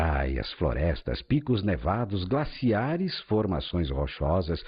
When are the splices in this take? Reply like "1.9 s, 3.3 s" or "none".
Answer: 3.2 s